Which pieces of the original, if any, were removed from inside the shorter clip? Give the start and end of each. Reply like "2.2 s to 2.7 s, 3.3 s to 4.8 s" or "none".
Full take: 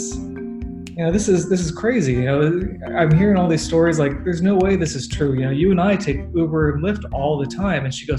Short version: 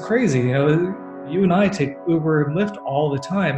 2.9 s to 5.4 s